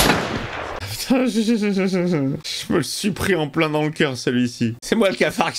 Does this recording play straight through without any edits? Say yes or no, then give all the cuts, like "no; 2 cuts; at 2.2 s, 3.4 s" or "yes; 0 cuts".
no; 2 cuts; at 0.8 s, 2.4 s